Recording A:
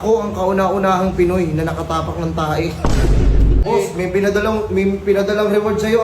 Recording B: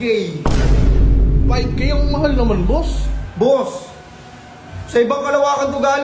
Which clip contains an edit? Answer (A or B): A